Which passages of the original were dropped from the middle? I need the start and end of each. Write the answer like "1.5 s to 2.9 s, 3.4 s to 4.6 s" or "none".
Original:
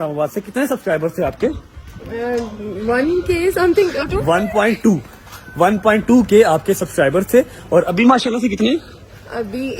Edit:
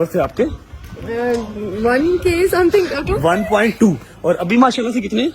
5.1 s to 7.6 s

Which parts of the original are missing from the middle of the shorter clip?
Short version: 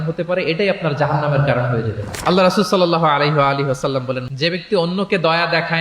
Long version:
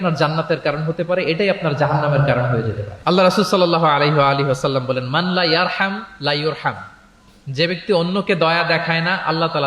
5.0 s to 7.4 s

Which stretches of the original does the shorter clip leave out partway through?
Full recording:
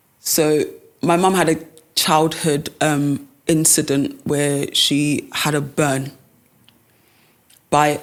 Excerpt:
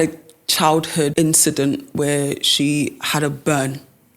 2.6 s to 3.4 s

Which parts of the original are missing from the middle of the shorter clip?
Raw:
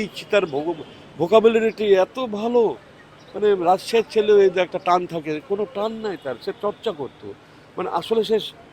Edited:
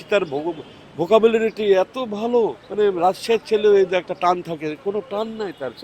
2.8 s to 3.3 s

